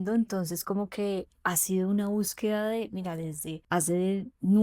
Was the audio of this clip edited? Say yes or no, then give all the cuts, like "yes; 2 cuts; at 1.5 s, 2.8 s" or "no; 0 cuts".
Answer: yes; 1 cut; at 3.5 s